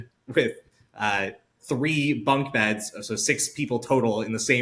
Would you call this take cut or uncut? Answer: uncut